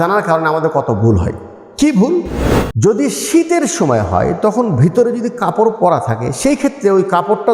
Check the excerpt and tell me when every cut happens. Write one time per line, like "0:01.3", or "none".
0:02.4